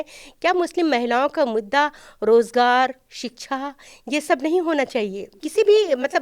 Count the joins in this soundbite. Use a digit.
1